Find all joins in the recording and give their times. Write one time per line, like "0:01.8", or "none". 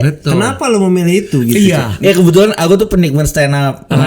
0:01.9